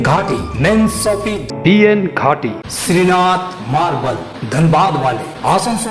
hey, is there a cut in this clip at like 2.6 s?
yes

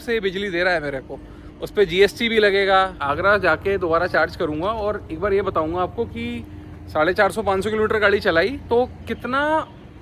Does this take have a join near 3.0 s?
yes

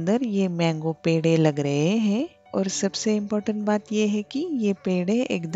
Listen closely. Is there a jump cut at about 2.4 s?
yes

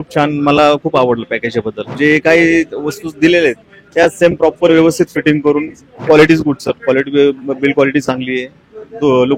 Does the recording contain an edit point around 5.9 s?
yes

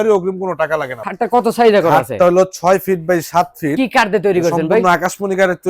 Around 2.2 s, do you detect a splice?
no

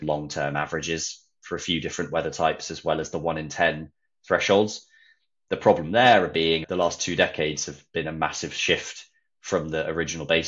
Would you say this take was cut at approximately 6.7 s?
yes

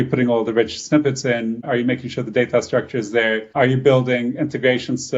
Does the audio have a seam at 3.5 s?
yes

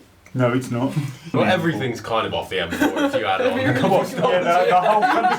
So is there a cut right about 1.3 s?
yes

